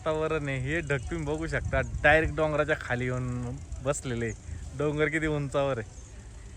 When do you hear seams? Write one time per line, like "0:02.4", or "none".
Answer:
none